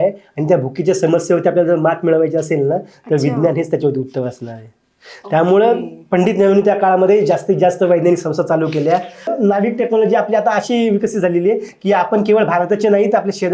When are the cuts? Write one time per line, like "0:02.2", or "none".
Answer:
0:09.3